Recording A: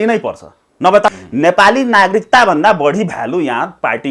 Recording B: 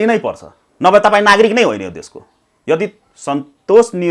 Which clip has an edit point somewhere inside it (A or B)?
A